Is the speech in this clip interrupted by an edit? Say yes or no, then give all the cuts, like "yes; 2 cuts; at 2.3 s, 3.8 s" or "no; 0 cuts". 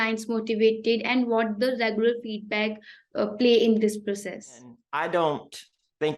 yes; 1 cut; at 4.8 s